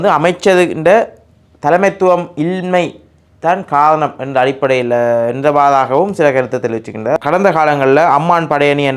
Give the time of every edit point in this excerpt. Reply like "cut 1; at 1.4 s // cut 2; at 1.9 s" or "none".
cut 1; at 7.2 s

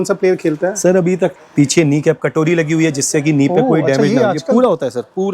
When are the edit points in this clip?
cut 1; at 1.4 s

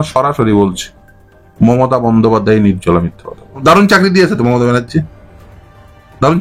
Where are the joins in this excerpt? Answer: cut 1; at 3.6 s

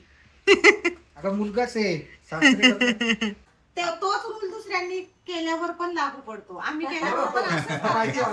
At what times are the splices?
cut 1; at 3.5 s

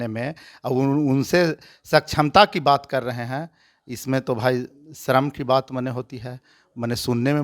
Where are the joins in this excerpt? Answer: none

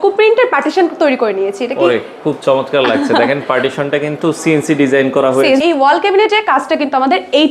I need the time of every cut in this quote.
cut 1; at 5.6 s

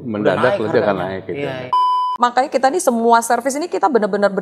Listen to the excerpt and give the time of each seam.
cut 1; at 1.9 s

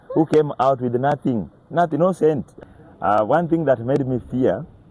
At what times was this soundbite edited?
cut 1; at 2.5 s

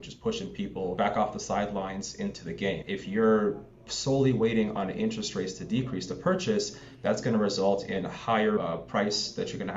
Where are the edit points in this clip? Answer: cut 1; at 1.0 s // cut 2; at 2.9 s

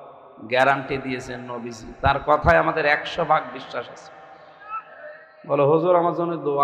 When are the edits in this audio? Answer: none

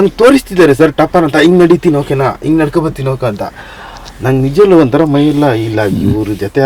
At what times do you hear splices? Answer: none

